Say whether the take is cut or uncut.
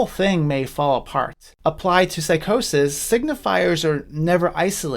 uncut